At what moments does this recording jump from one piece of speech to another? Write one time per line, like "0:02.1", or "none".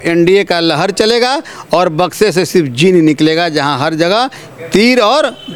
none